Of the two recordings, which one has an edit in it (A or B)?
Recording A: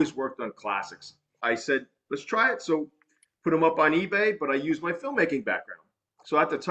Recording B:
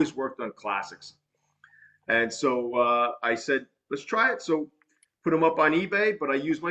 A